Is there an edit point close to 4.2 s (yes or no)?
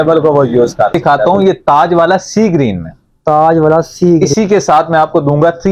yes